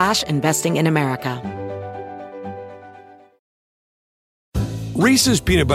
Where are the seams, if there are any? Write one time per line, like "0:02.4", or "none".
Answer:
0:01.4